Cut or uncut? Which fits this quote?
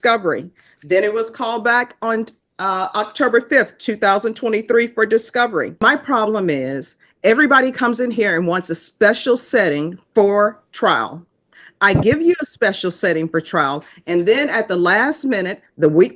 cut